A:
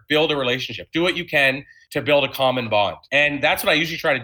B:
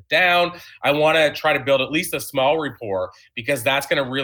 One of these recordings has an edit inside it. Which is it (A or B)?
A